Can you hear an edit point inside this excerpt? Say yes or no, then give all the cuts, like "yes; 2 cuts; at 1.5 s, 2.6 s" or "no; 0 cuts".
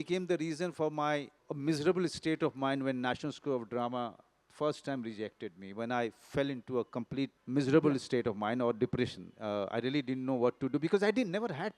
yes; 2 cuts; at 1.4 s, 7.4 s